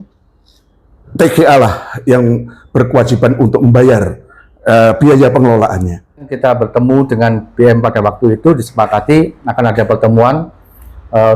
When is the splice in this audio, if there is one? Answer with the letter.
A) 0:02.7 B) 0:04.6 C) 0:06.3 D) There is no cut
C